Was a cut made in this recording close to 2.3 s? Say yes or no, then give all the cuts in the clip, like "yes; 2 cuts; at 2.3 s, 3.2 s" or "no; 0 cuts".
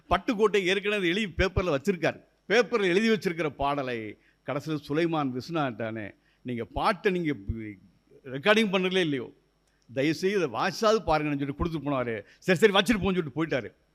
yes; 1 cut; at 2.3 s